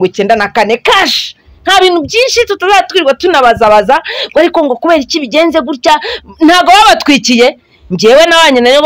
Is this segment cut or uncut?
uncut